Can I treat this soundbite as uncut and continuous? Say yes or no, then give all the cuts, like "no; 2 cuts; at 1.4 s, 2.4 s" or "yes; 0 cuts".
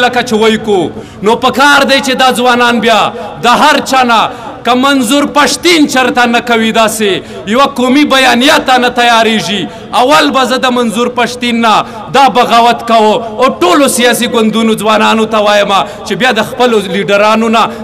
no; 1 cut; at 1.0 s